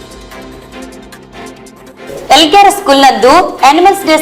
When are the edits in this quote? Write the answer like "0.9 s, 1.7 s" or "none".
1.4 s